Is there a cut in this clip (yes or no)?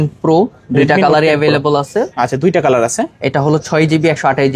no